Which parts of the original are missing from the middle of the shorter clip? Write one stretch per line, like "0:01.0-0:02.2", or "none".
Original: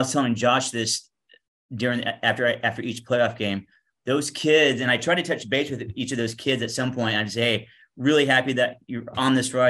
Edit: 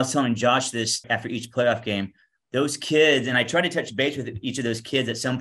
0:01.1-0:02.6